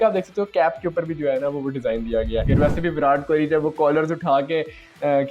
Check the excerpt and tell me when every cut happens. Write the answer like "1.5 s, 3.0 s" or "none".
2.5 s